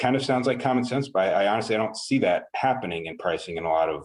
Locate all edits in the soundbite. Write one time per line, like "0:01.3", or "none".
0:03.1